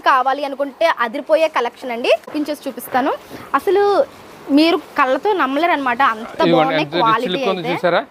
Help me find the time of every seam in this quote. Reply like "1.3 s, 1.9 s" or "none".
none